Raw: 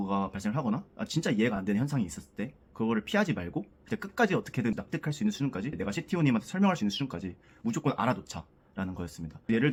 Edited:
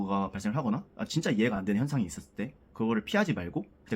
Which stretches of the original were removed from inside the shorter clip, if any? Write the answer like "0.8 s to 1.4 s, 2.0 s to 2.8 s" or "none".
none